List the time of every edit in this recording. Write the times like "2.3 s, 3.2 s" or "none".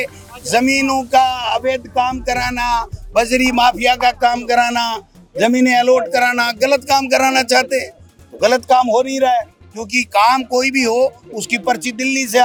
none